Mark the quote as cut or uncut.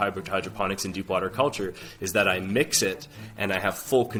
uncut